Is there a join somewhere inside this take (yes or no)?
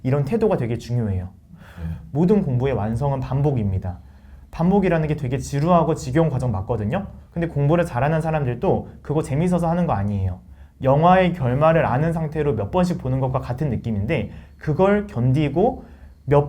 yes